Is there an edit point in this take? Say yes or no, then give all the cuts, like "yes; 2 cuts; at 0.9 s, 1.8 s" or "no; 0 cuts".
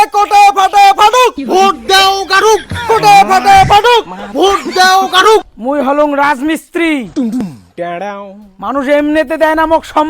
yes; 1 cut; at 5.5 s